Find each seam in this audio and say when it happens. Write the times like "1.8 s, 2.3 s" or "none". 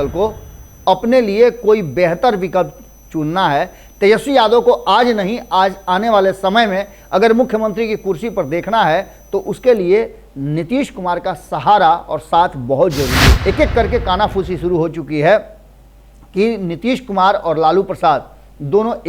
13.3 s